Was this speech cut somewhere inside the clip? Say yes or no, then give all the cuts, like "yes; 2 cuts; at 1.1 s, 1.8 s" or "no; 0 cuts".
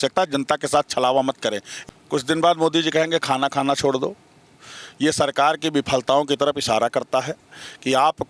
yes; 1 cut; at 1.7 s